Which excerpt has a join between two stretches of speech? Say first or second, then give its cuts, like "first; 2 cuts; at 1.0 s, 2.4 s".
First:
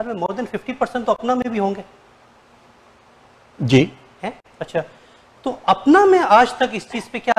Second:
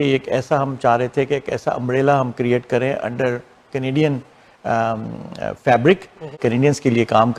second; 1 cut; at 6.3 s